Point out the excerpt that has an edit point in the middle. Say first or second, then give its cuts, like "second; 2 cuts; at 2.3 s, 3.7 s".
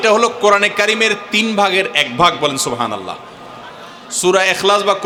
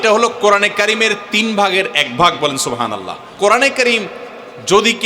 second; 1 cut; at 3.2 s